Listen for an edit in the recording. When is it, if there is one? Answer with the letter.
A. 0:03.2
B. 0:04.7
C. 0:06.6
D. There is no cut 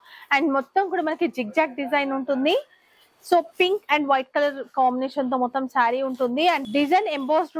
C